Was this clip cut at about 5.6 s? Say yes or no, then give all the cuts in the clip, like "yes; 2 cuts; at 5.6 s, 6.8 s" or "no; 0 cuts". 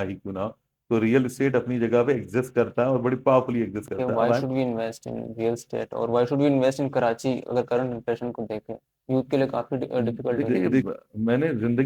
no; 2 cuts; at 4.4 s, 10.9 s